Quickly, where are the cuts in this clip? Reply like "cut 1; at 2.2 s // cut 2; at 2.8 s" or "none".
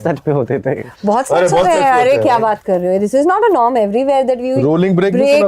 none

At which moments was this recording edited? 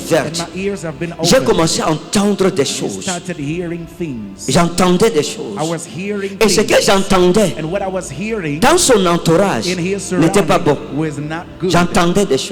none

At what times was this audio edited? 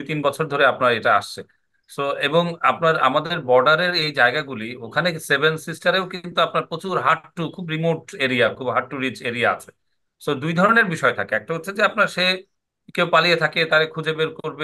none

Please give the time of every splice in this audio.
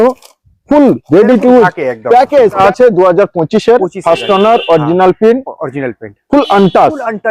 cut 1; at 2.6 s

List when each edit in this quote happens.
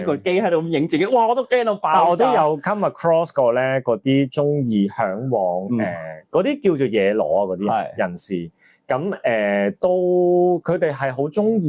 none

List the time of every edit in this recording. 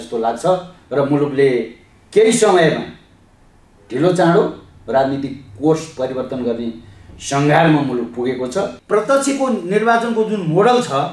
cut 1; at 8.8 s

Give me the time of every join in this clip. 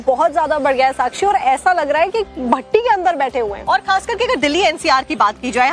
cut 1; at 1.6 s

